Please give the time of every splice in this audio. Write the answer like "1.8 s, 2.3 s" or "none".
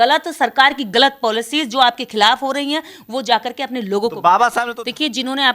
4.6 s